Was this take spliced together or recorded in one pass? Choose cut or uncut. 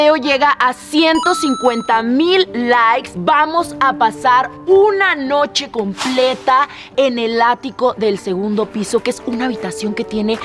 uncut